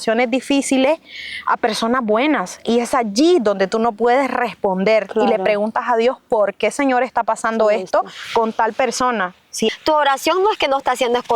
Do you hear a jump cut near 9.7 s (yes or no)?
yes